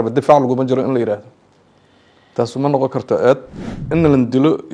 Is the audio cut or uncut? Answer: cut